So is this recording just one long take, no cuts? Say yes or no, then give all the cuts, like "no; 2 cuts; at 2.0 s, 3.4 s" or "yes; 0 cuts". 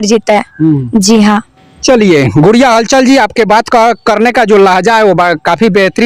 yes; 0 cuts